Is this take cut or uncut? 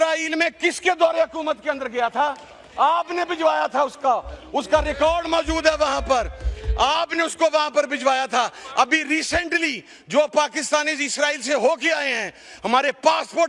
uncut